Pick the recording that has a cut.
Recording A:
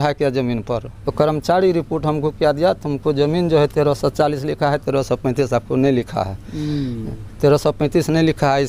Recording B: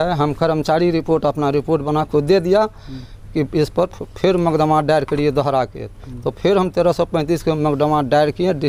A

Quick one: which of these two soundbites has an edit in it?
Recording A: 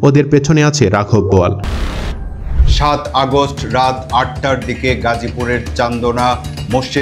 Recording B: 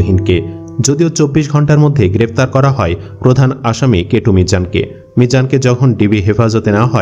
A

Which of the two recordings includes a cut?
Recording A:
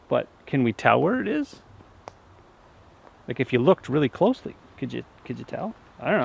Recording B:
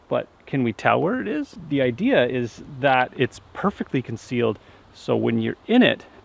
B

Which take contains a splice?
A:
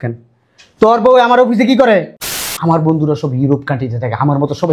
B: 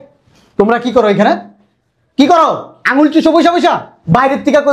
A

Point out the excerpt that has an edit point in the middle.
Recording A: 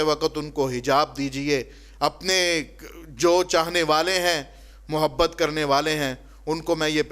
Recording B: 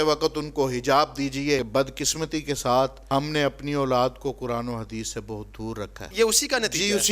B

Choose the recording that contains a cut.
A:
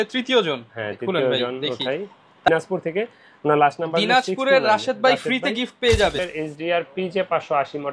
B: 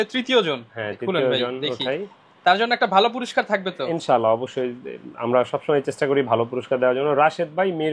A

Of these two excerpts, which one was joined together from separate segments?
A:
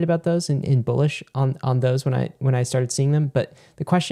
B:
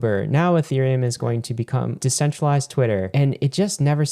B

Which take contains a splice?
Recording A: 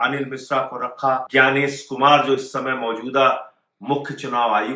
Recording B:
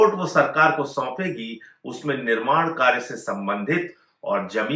A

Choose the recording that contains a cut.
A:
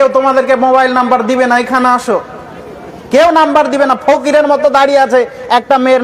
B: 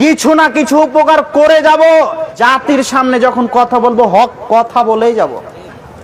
B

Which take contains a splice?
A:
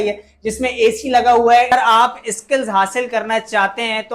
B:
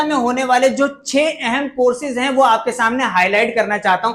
A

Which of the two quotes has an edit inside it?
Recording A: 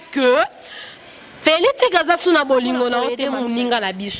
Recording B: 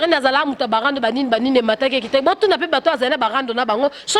A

